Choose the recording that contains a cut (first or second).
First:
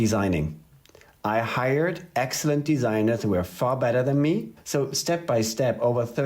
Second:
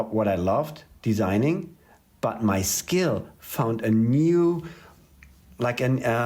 first